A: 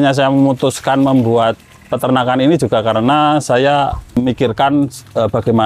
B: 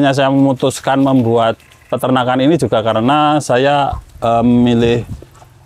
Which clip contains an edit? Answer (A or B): A